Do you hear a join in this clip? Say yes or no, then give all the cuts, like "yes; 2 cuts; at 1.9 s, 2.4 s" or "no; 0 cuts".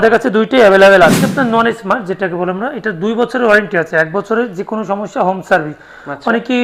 yes; 1 cut; at 1.2 s